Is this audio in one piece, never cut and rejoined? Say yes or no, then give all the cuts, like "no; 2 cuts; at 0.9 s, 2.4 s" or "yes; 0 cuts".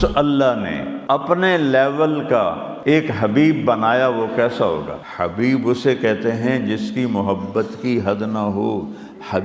no; 3 cuts; at 0.9 s, 2.7 s, 5.0 s